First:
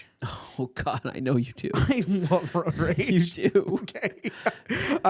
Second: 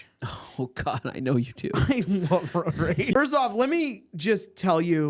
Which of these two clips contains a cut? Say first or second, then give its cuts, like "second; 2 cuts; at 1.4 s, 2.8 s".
second; 1 cut; at 3.1 s